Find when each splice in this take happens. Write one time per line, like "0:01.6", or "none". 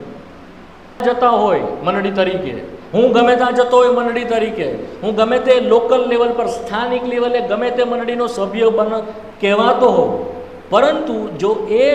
0:01.0